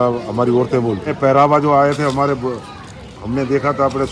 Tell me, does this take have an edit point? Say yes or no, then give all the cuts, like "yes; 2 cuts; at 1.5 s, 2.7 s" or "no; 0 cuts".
no; 0 cuts